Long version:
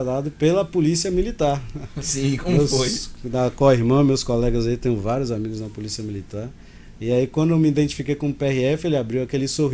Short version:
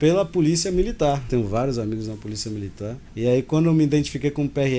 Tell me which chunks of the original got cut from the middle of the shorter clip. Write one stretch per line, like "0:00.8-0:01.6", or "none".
0:01.7-0:04.8
0:06.6-0:06.9